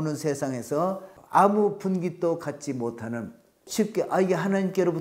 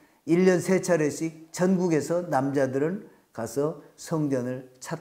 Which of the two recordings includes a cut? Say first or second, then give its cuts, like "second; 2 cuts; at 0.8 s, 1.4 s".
first; 2 cuts; at 1.1 s, 3.6 s